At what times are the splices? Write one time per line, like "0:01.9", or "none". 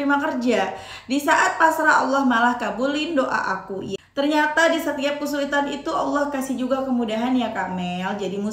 0:03.9